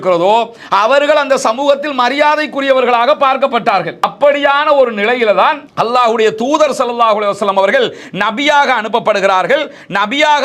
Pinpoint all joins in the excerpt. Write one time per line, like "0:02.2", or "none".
0:04.0